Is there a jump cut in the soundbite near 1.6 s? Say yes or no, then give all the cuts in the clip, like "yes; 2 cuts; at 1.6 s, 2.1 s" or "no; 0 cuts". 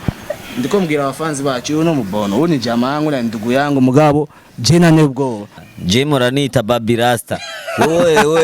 no; 1 cut; at 5.5 s